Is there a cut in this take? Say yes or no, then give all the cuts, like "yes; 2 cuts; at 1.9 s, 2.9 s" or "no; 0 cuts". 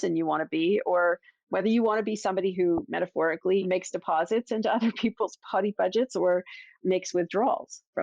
yes; 2 cuts; at 3.6 s, 6.7 s